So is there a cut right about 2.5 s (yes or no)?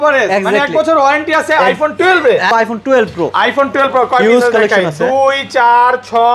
yes